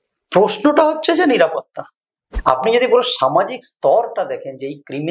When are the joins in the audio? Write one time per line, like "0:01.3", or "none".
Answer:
0:02.3